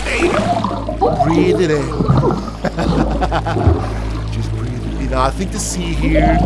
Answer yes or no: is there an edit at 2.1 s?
no